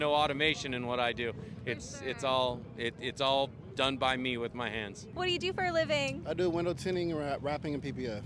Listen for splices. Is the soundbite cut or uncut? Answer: uncut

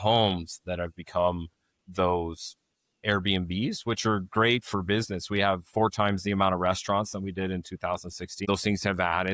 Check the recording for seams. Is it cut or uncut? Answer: cut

